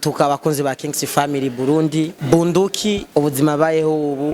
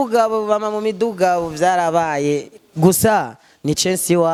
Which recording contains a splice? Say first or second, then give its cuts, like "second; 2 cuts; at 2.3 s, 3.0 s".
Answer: first; 2 cuts; at 2.2 s, 3.1 s